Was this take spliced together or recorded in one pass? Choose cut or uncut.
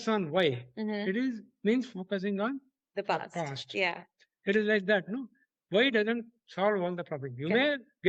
uncut